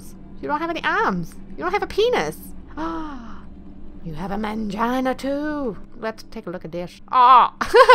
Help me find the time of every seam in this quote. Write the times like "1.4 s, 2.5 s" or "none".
5.9 s, 7.0 s